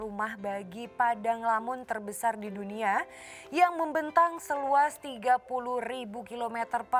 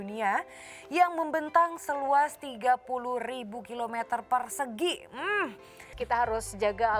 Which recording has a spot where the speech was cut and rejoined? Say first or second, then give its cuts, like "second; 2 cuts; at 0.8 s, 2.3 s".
second; 1 cut; at 6.0 s